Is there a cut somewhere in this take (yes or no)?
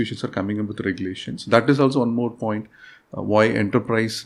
no